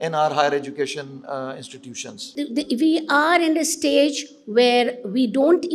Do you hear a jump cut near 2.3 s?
yes; 1 cut; at 2.3 s

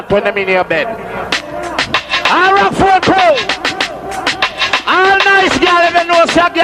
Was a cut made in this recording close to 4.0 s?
no; 1 cut; at 1.3 s

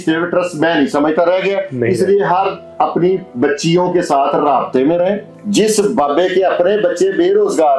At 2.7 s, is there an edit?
no; 1 cut; at 5.3 s

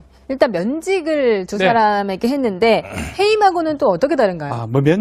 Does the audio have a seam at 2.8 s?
yes; 1 cut; at 2.8 s

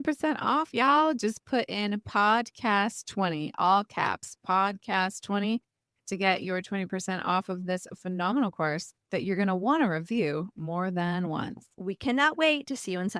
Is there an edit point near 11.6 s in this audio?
yes; 1 cut; at 11.6 s

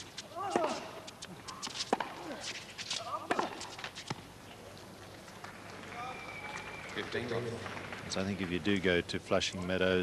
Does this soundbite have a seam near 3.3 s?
yes; 1 cut; at 3.3 s

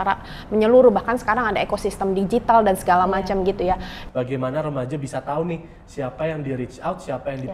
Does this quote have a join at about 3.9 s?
yes; 1 cut; at 3.9 s

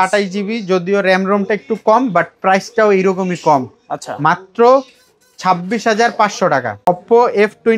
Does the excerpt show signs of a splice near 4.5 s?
no; 1 cut; at 6.9 s

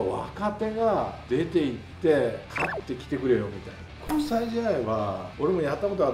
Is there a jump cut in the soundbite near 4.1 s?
yes; 4 cuts; at 1.2 s, 2.5 s, 4.1 s, 5.2 s

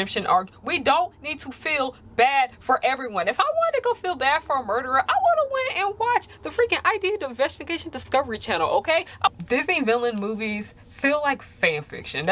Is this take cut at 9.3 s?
yes; 1 cut; at 9.3 s

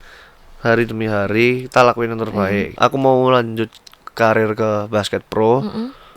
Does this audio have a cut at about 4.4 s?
no; 1 cut; at 2.7 s

